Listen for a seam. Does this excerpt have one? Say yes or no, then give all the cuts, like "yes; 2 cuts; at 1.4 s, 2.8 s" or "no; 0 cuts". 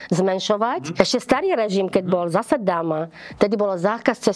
yes; 1 cut; at 1.0 s